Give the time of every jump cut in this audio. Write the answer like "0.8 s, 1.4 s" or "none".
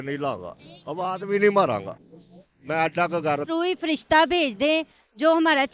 3.5 s